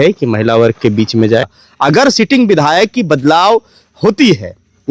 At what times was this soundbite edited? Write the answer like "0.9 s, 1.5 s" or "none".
1.6 s